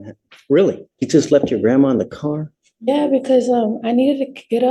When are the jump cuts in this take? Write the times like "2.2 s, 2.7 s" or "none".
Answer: 0.9 s